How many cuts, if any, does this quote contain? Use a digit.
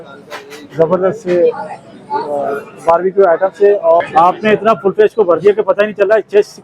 1